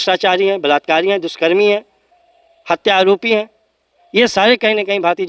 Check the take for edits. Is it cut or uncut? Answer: uncut